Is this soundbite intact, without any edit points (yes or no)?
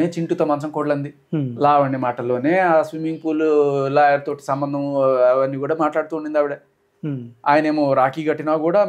yes